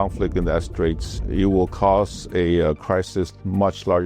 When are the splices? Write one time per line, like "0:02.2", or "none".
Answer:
0:01.2